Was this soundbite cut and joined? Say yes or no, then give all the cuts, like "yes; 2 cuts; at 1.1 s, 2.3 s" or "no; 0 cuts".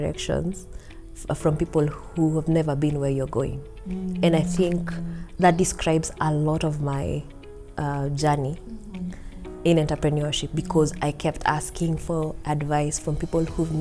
no; 0 cuts